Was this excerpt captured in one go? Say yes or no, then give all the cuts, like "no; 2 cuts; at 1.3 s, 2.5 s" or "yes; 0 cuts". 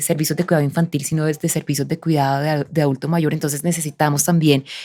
yes; 0 cuts